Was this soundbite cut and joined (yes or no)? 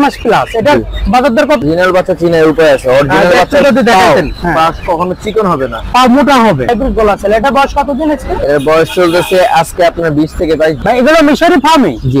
yes